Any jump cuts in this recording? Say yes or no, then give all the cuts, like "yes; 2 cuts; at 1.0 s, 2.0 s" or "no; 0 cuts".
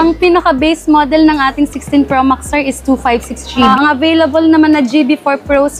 yes; 1 cut; at 3.7 s